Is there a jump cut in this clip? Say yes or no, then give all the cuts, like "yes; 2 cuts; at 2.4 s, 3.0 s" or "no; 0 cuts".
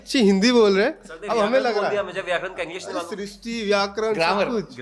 no; 0 cuts